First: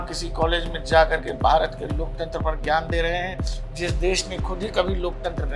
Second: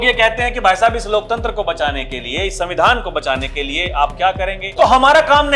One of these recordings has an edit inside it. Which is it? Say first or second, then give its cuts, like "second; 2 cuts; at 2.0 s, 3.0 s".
second; 1 cut; at 4.6 s